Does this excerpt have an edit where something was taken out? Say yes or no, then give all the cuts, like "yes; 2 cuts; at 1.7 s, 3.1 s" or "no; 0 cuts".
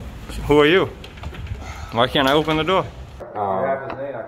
yes; 1 cut; at 3.3 s